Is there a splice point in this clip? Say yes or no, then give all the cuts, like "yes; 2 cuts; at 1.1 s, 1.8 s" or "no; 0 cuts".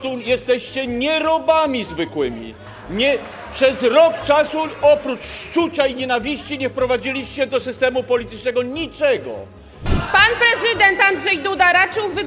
yes; 1 cut; at 9.9 s